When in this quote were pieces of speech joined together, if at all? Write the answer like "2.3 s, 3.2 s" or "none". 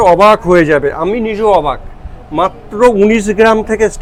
none